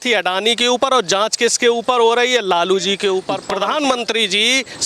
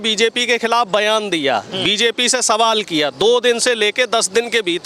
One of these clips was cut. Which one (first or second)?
first